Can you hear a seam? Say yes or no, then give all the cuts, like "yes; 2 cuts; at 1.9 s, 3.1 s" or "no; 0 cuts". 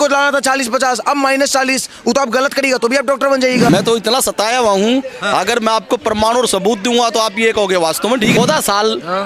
yes; 2 cuts; at 3.7 s, 8.4 s